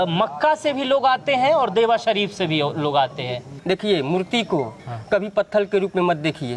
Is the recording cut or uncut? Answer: cut